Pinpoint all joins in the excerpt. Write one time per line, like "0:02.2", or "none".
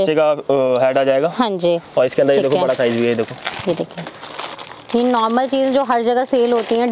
none